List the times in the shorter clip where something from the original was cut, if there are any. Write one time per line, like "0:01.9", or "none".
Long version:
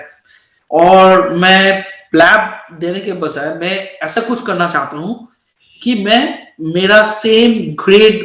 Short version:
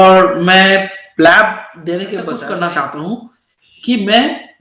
0:02.4